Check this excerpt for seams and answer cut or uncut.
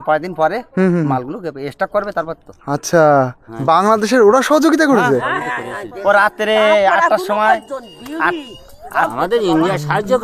uncut